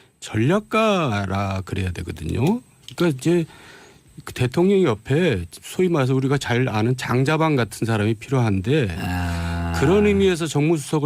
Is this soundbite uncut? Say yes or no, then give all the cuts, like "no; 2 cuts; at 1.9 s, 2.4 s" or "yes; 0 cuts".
no; 1 cut; at 3.1 s